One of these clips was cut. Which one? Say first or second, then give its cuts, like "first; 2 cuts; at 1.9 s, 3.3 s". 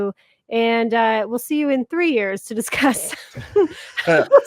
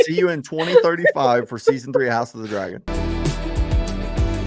second; 1 cut; at 2.8 s